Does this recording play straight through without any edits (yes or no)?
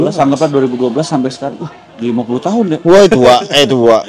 yes